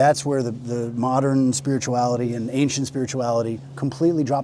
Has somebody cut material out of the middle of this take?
no; 0 cuts

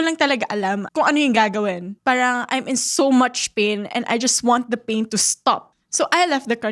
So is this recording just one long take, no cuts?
yes; 0 cuts

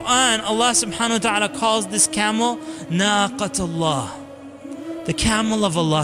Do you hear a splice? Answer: no; 0 cuts

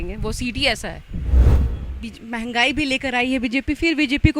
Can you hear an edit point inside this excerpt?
yes; 1 cut; at 1.5 s

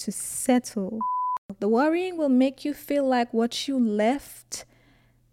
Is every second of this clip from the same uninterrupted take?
no; 1 cut; at 1.5 s

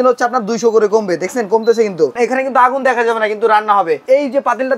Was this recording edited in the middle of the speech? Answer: yes; 2 cuts; at 2.2 s, 4.0 s

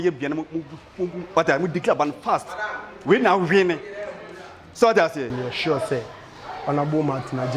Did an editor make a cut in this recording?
yes; 1 cut; at 5.3 s

